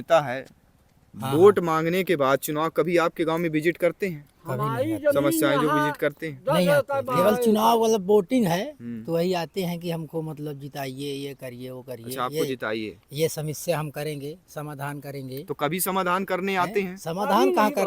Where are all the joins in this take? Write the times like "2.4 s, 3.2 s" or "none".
none